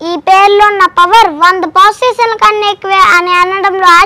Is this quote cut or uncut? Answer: uncut